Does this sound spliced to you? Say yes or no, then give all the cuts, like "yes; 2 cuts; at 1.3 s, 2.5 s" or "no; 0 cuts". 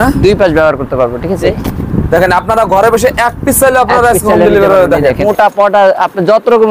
yes; 2 cuts; at 1.4 s, 5.2 s